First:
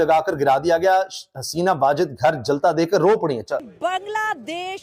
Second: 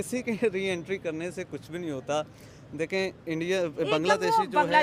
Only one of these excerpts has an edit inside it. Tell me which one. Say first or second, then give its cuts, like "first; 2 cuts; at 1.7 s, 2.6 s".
first; 1 cut; at 3.5 s